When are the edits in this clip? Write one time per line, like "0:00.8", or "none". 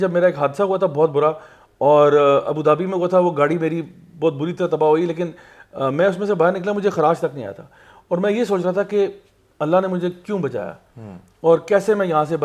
none

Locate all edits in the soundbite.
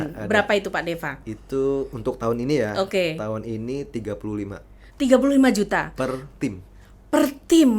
none

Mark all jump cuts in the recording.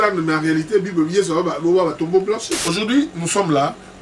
0:02.6

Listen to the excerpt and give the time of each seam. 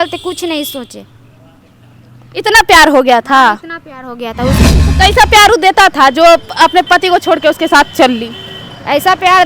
0:04.6

